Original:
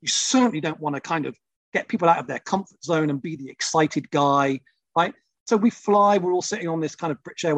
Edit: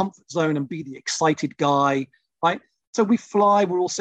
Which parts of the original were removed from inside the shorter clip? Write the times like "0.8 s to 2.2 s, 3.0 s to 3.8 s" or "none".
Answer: none